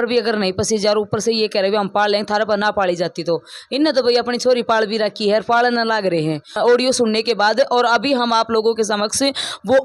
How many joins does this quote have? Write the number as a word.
one